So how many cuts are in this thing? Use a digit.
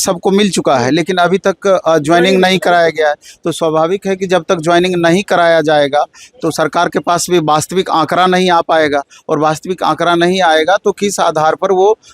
0